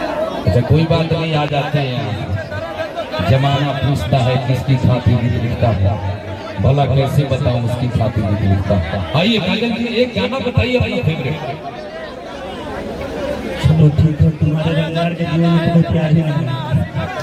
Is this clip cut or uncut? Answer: uncut